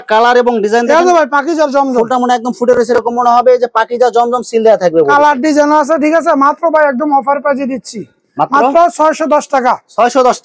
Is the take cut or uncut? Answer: uncut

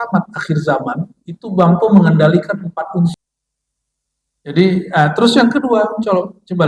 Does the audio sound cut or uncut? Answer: cut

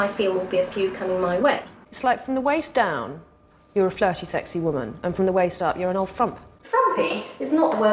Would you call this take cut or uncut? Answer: cut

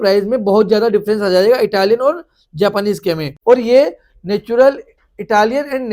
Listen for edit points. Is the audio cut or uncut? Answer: cut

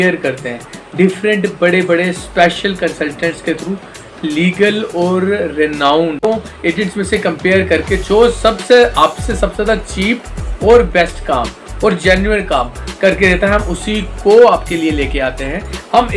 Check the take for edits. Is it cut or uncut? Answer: cut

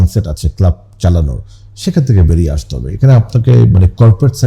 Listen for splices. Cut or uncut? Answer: uncut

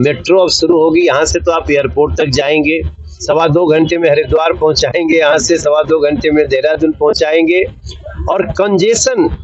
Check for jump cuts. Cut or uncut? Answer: cut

